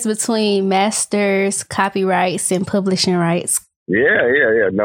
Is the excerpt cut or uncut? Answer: uncut